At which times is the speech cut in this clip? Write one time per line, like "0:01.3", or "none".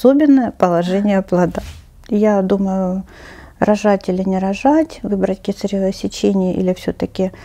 0:01.7